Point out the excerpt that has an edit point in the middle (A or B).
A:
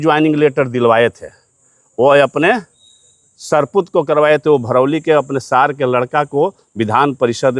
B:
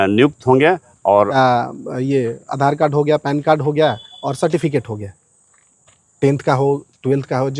B